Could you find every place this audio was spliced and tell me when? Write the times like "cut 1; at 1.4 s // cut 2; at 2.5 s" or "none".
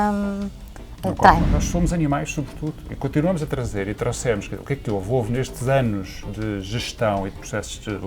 cut 1; at 1.6 s